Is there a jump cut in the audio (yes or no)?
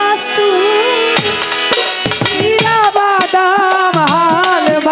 no